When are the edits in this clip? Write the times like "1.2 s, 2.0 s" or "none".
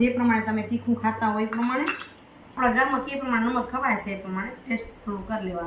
2.6 s